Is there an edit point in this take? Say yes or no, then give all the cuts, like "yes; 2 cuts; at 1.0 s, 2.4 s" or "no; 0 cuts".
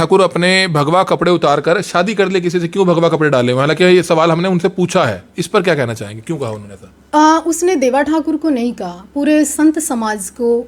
no; 0 cuts